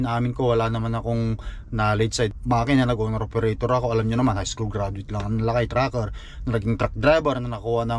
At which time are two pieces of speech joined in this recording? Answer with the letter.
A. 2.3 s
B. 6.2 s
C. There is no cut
A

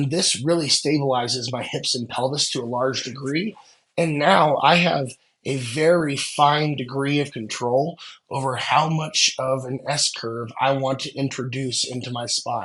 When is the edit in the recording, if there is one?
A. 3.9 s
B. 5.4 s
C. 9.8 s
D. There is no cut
D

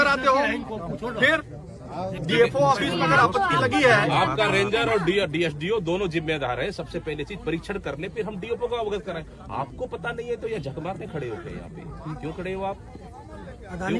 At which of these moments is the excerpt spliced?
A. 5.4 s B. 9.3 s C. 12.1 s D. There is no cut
D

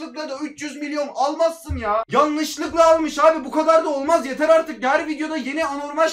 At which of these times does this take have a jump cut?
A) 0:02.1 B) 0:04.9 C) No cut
A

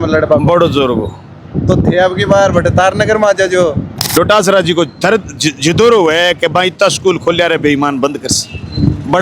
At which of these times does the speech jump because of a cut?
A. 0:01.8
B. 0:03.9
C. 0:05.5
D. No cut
B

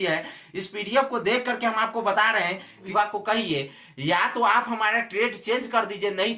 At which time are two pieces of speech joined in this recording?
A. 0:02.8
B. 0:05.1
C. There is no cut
A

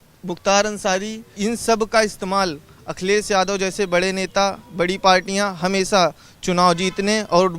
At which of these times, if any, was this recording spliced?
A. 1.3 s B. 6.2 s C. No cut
A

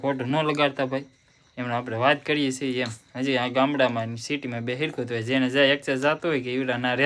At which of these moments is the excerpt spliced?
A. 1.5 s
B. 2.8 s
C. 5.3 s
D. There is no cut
D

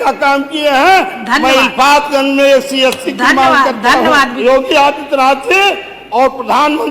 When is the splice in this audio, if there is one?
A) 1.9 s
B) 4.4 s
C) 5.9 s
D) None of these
B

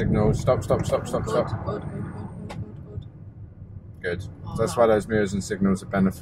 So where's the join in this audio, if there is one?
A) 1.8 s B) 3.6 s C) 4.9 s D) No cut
D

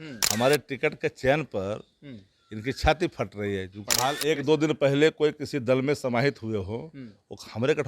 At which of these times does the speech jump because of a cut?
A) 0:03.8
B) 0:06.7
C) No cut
A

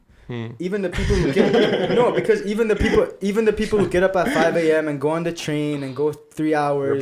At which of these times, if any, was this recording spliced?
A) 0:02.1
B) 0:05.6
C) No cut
C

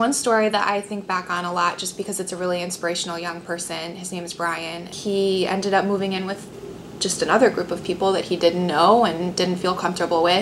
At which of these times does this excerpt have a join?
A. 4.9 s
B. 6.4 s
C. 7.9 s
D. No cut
A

